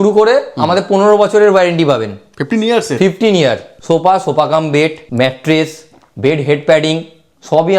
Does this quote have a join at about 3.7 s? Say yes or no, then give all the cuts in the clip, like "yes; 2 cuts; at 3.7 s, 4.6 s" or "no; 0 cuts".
yes; 2 cuts; at 3.7 s, 5.0 s